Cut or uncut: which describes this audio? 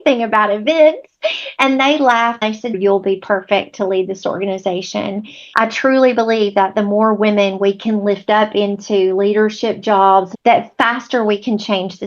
cut